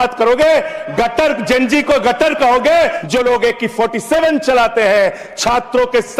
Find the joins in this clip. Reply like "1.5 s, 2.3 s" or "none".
3.0 s